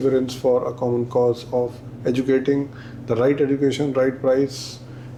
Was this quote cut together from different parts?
no; 0 cuts

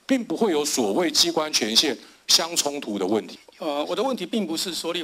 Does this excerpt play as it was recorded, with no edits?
no; 1 cut; at 3.3 s

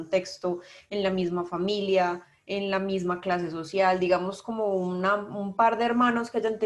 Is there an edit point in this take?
no; 0 cuts

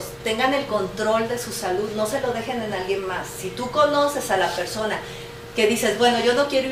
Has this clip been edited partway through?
no; 0 cuts

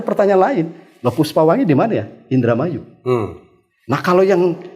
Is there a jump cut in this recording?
no; 0 cuts

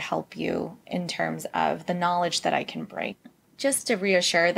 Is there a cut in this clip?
yes; 1 cut; at 3.2 s

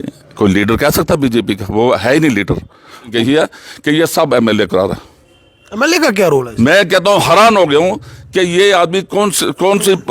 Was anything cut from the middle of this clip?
yes; 1 cut; at 3.1 s

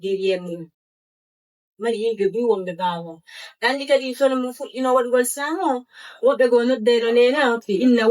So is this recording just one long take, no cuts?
yes; 0 cuts

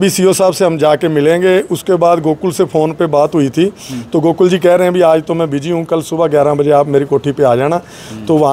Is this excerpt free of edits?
yes; 0 cuts

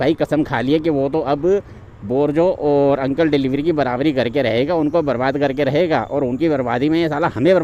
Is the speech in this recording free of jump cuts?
yes; 0 cuts

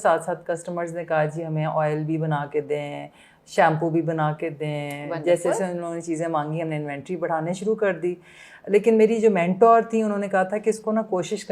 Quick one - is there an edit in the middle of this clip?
no; 0 cuts

